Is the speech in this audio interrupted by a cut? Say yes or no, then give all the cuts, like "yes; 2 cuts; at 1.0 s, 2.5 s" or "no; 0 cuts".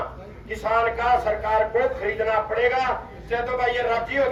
no; 0 cuts